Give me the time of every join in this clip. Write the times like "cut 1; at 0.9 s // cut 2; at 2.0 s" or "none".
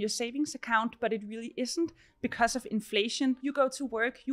cut 1; at 3.4 s

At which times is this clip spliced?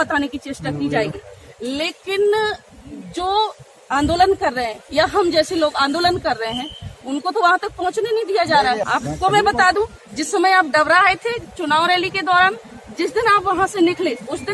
cut 1; at 8.8 s

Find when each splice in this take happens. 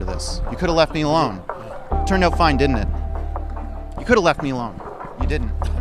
none

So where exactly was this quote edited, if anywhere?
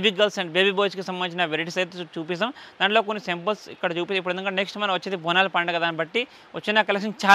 none

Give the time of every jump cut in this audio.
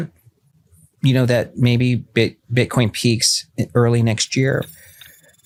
none

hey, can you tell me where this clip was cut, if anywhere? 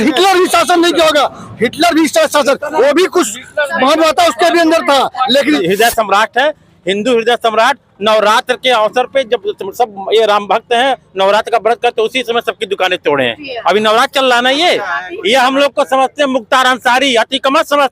cut 1; at 5.6 s

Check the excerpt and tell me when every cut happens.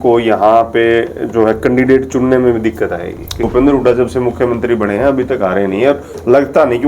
cut 1; at 3.4 s

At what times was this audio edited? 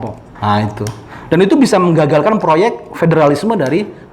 none

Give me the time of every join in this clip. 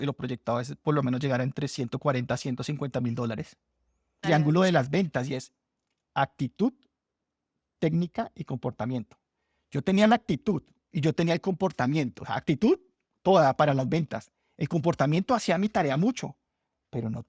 cut 1; at 4.2 s

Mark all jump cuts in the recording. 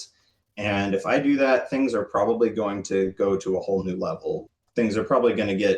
none

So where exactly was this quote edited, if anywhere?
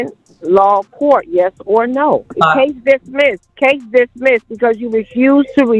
cut 1; at 2.3 s // cut 2; at 3.5 s

